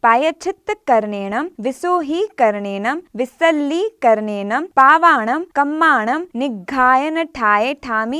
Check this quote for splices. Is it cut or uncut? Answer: cut